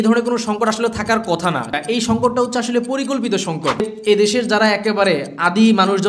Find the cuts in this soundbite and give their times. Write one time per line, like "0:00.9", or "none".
0:01.7
0:03.9